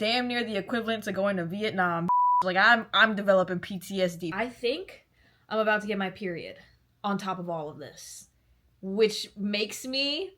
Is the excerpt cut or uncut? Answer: cut